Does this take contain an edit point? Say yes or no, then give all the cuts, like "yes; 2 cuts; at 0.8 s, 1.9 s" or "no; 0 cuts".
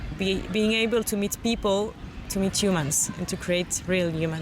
yes; 1 cut; at 2.1 s